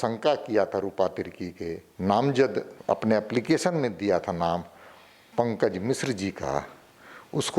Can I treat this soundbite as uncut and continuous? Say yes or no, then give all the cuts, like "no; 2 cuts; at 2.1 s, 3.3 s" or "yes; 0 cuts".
no; 2 cuts; at 1.8 s, 2.7 s